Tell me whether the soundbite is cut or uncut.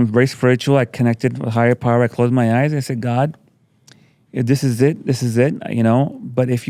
uncut